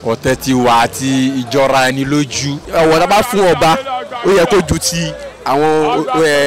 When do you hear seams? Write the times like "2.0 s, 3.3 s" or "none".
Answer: 2.6 s